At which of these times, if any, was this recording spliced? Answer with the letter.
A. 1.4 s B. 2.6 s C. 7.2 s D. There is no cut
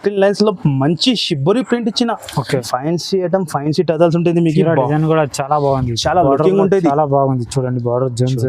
B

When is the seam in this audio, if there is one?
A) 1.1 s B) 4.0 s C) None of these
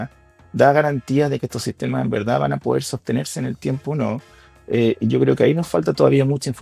C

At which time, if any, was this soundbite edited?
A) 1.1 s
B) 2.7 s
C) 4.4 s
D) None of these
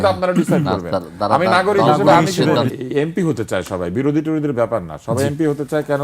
B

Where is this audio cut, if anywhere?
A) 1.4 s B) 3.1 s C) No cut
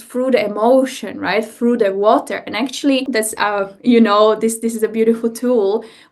B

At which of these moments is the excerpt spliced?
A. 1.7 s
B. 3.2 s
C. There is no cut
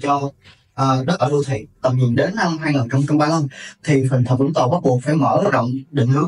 A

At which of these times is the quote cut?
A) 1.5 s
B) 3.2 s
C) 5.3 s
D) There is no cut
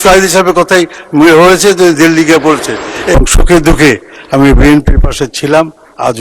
B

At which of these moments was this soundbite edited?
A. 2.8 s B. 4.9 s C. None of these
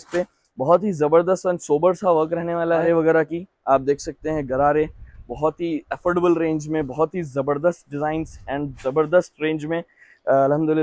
A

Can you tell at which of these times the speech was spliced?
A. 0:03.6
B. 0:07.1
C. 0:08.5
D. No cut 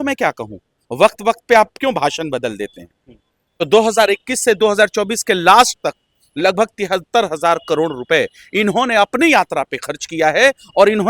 A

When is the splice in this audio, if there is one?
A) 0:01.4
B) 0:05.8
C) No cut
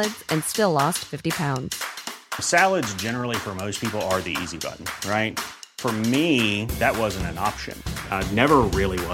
C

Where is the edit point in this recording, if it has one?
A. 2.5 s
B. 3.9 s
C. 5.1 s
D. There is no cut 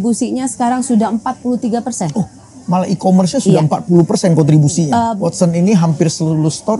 C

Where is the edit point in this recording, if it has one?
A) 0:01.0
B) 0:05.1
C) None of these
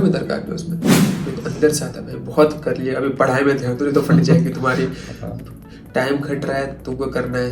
A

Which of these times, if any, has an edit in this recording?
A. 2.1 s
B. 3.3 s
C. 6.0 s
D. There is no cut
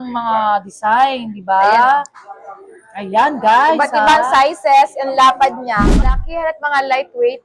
C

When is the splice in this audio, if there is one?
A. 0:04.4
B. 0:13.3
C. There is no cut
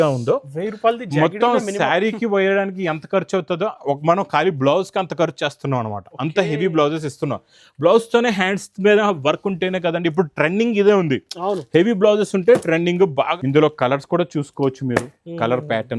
B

